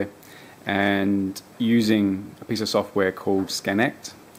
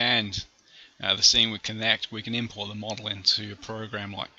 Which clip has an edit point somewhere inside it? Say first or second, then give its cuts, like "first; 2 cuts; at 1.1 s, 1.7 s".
second; 1 cut; at 1.4 s